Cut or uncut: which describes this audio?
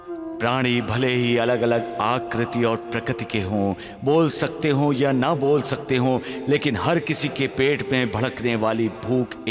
uncut